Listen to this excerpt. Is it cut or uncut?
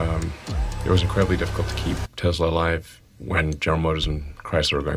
uncut